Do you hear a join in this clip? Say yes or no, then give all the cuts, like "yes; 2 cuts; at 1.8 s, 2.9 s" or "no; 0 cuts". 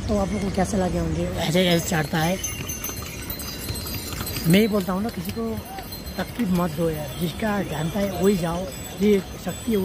yes; 1 cut; at 1.4 s